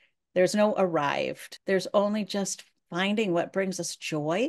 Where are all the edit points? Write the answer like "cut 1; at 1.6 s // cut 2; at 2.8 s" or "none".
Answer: cut 1; at 1.5 s